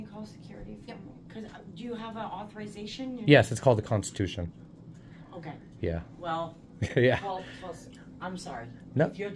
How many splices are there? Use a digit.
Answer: 0